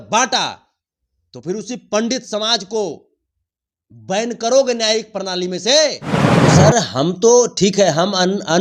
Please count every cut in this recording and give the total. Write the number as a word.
one